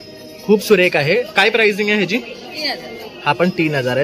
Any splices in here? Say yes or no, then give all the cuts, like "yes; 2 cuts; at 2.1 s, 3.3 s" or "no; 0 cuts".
no; 0 cuts